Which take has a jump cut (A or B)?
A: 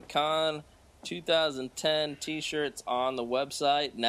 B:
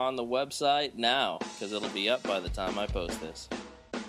B